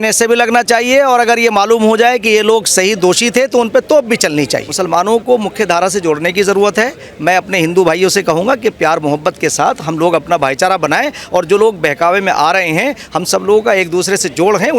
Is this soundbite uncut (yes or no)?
no